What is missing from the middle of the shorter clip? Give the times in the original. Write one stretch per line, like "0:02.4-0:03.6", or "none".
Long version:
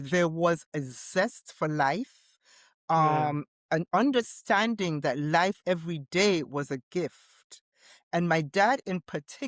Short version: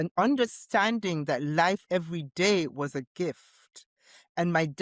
none